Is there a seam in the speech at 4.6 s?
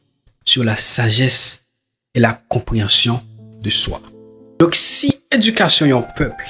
yes; 1 cut; at 4.6 s

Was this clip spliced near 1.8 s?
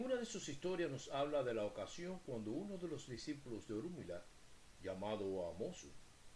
yes; 1 cut; at 1.8 s

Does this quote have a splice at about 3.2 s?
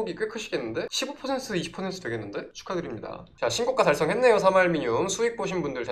yes; 1 cut; at 3.2 s

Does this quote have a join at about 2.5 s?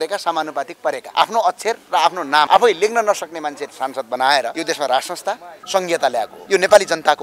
yes; 5 cuts; at 1.0 s, 2.5 s, 4.6 s, 5.5 s, 6.4 s

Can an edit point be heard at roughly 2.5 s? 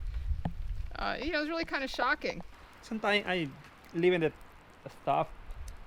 yes; 1 cut; at 2.5 s

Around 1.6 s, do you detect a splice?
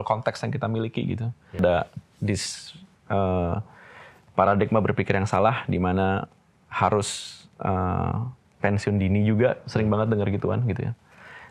yes; 1 cut; at 1.6 s

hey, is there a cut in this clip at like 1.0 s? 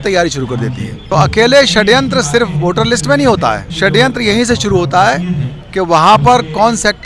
yes; 2 cuts; at 1.0 s, 3.7 s

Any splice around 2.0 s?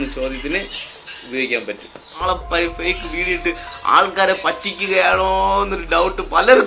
yes; 1 cut; at 2.0 s

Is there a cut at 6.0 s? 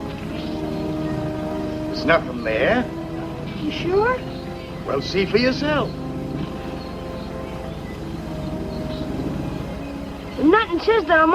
yes; 1 cut; at 6.0 s

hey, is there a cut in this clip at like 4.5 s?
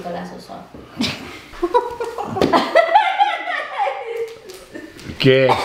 no; 1 cut; at 1.5 s

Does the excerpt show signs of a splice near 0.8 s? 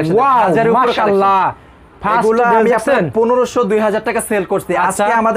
no; 0 cuts

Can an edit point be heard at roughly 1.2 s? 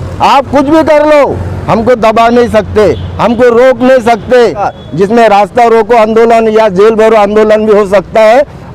no; 1 cut; at 4.7 s

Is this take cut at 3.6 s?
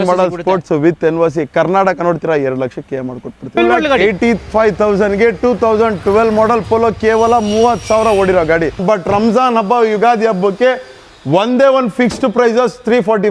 yes; 2 cuts; at 3.6 s, 8.8 s

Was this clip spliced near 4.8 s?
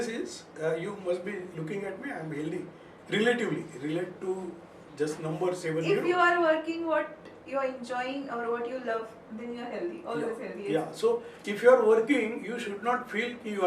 no; 0 cuts

